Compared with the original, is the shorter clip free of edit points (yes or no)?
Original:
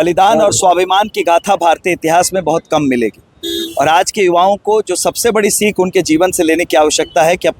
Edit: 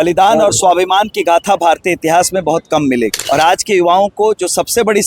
no